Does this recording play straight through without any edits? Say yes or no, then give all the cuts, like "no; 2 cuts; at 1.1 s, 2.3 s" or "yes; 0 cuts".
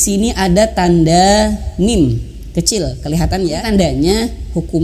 no; 1 cut; at 3.6 s